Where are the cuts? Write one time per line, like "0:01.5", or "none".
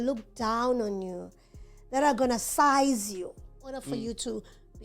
0:03.9

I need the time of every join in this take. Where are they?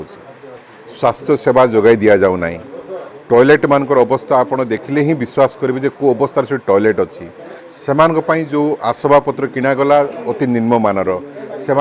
none

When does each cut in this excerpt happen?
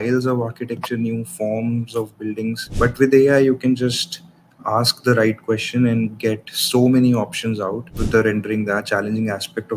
0:02.6
0:08.0

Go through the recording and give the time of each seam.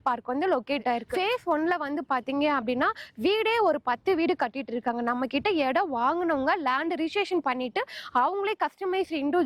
0:01.1

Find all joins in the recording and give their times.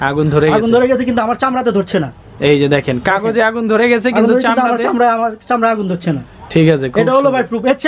none

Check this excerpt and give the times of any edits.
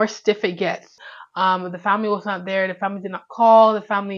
0:00.9

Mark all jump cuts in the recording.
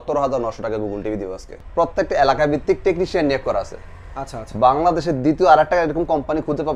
0:01.5

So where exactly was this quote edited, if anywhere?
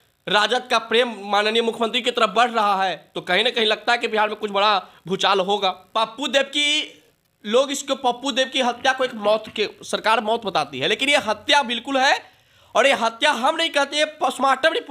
0:05.9

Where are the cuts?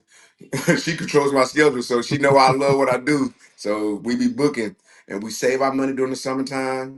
none

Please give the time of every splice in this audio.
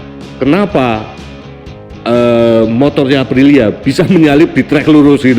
none

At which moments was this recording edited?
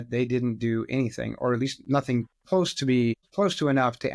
0:03.2

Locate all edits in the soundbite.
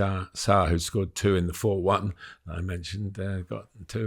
none

